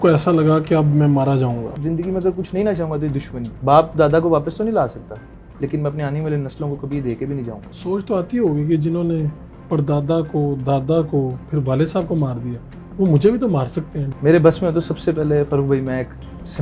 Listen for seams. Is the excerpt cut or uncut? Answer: cut